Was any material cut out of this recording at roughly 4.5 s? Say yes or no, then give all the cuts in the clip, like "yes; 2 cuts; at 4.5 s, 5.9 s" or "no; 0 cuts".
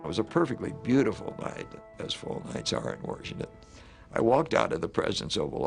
no; 1 cut; at 1.8 s